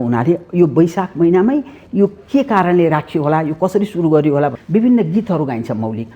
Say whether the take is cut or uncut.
cut